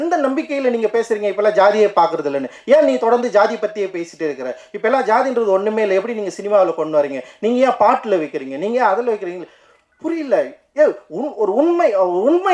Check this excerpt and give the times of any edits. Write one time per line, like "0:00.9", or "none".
none